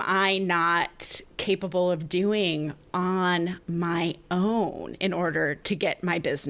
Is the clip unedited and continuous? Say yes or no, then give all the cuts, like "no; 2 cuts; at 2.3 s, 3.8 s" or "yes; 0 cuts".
no; 1 cut; at 5.6 s